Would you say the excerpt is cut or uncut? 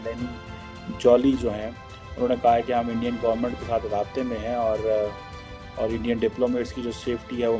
uncut